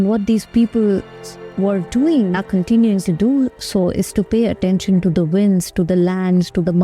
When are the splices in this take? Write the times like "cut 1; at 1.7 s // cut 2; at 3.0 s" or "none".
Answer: cut 1; at 2.4 s